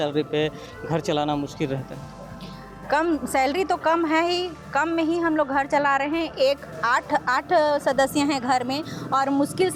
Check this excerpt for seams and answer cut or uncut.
uncut